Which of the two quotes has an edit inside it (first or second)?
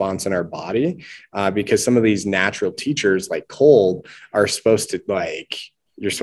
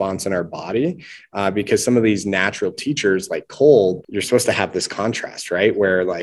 second